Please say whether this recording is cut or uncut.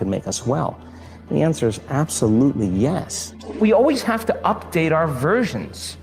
cut